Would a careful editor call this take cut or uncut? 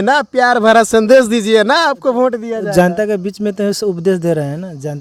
uncut